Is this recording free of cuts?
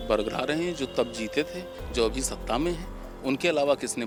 yes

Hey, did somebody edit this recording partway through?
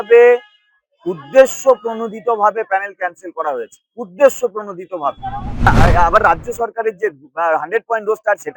yes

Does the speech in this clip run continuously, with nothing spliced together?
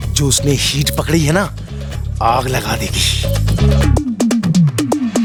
yes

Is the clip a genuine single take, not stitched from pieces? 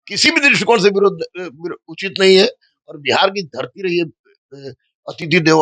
yes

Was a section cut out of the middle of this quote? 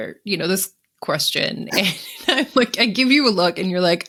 no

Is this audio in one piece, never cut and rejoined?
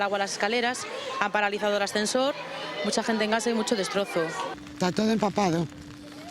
yes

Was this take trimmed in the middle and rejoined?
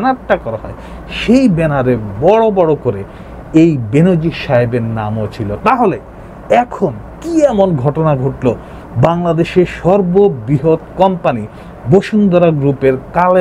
no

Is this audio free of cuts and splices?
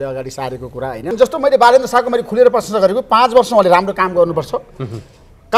no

